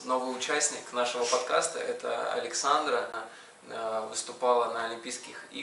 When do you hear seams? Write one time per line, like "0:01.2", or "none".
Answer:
0:03.1